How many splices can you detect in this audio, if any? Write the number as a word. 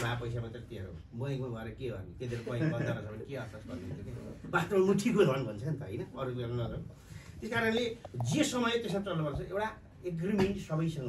zero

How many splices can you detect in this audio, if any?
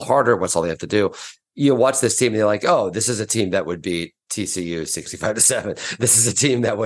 one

